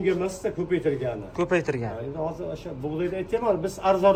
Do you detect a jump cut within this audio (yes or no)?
no